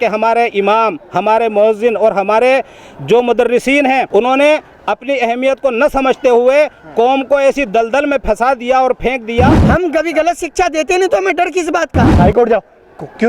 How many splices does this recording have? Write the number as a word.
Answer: three